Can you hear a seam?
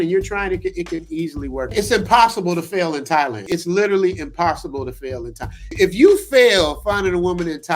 yes; 3 cuts; at 1.7 s, 3.4 s, 5.7 s

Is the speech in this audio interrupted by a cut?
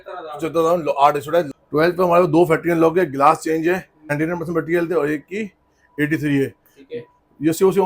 yes; 2 cuts; at 1.6 s, 4.1 s

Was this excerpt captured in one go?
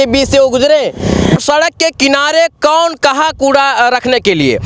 no; 1 cut; at 1.4 s

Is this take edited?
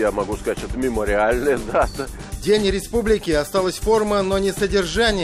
no; 0 cuts

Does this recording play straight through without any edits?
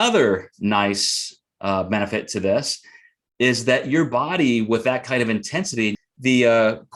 no; 1 cut; at 5.9 s

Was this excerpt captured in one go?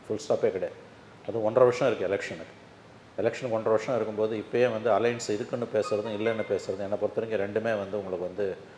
yes; 0 cuts

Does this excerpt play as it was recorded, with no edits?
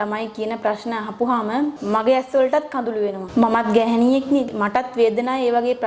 no; 3 cuts; at 1.8 s, 3.2 s, 4.5 s

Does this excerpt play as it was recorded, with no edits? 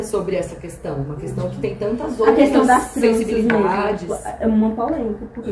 yes; 0 cuts

